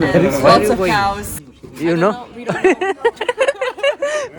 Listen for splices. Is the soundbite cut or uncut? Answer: cut